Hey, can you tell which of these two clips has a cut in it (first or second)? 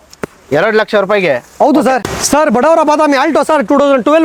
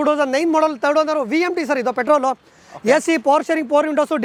first